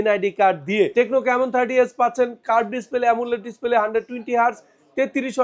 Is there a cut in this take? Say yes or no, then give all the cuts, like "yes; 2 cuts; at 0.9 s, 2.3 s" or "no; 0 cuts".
yes; 1 cut; at 0.9 s